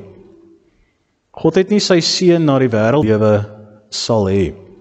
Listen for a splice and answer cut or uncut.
cut